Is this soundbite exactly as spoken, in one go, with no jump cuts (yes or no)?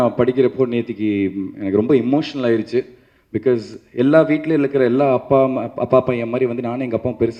yes